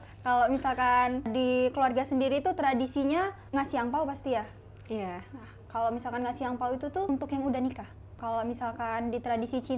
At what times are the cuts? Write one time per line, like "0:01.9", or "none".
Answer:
0:01.3
0:03.4
0:07.1
0:08.2